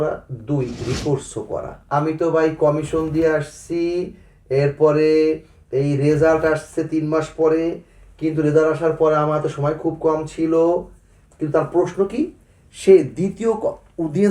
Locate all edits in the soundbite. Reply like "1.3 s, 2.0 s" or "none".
1.7 s